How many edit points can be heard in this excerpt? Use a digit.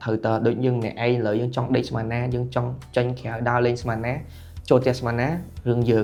0